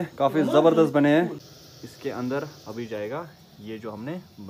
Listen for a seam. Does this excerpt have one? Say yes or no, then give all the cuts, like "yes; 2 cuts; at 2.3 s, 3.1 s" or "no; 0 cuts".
yes; 1 cut; at 1.2 s